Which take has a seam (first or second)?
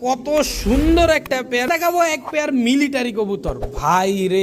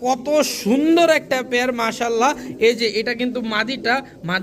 first